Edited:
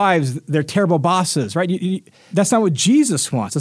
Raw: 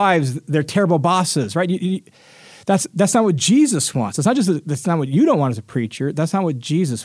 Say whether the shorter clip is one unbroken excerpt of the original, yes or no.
no